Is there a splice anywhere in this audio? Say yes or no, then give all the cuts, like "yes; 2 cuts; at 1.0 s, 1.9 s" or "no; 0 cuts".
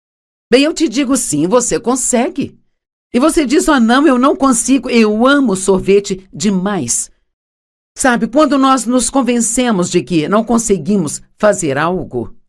yes; 1 cut; at 10.8 s